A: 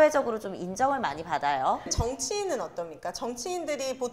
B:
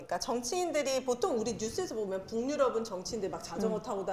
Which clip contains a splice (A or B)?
A